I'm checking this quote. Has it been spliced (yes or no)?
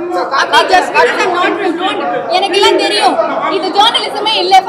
no